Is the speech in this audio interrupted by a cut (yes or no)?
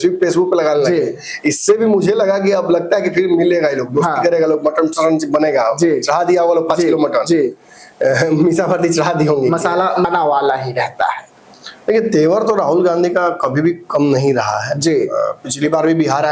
yes